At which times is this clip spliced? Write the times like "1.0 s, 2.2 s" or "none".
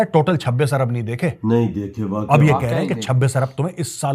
none